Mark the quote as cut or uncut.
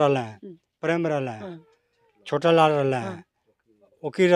uncut